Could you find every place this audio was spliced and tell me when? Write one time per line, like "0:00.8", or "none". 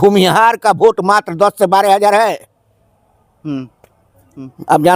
none